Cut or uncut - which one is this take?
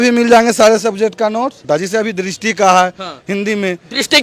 cut